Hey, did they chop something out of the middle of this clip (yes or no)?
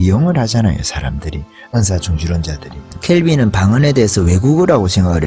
no